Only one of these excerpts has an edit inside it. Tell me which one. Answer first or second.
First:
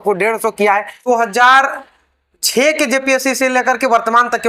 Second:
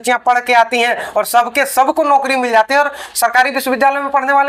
first